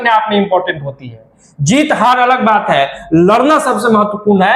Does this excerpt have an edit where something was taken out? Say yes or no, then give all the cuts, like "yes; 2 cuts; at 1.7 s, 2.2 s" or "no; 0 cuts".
no; 0 cuts